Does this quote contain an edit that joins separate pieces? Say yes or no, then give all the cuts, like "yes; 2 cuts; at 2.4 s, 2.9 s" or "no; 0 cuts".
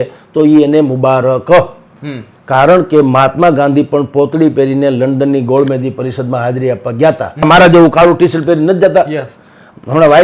yes; 1 cut; at 7.4 s